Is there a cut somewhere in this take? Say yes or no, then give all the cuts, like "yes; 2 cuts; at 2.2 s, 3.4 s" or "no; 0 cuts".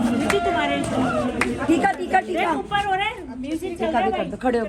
no; 0 cuts